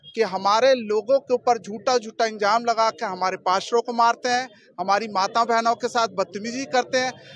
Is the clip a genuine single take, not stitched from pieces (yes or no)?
yes